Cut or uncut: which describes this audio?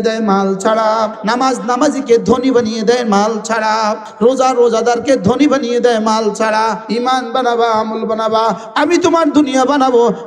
cut